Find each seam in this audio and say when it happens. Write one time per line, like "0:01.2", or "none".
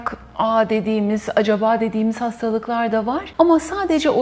0:03.3

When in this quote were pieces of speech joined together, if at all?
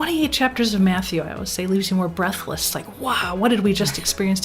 0:02.8

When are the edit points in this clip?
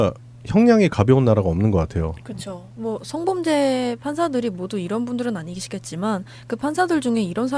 0:02.4

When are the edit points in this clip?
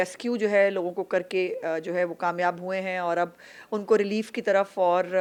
none

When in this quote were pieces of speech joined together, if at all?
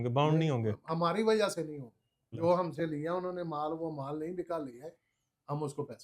0:02.3

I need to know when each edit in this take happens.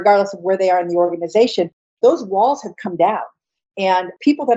0:02.0

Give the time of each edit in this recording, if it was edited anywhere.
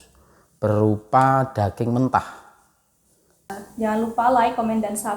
0:03.5

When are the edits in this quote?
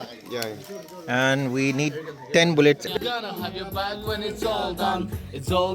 0:02.9

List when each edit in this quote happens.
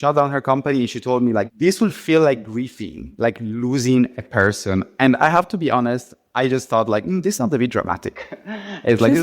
0:01.5

